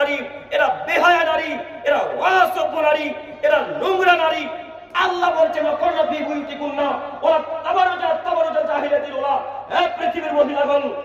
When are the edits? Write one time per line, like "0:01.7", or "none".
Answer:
none